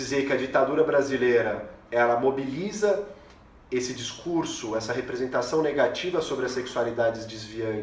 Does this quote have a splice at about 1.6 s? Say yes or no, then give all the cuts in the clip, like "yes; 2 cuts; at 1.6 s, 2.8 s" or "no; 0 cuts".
no; 0 cuts